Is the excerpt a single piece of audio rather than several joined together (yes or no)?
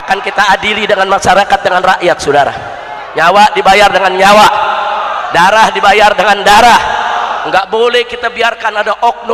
yes